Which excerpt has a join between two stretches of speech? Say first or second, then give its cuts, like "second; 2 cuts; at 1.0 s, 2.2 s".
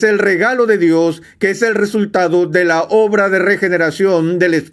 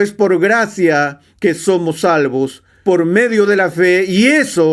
second; 1 cut; at 2.6 s